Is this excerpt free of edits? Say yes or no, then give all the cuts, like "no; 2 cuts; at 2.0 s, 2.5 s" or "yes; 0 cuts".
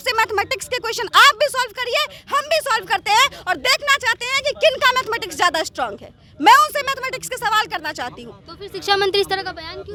yes; 0 cuts